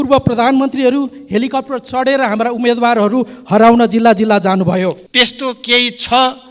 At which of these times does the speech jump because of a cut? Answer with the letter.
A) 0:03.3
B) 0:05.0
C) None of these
B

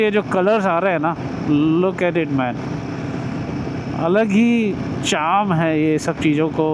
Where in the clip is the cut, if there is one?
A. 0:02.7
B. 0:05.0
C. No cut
C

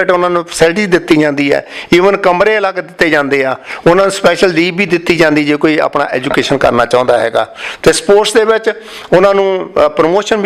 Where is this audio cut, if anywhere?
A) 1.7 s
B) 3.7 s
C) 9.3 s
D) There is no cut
D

